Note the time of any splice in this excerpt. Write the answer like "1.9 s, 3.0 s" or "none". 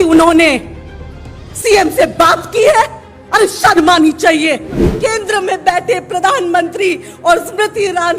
4.9 s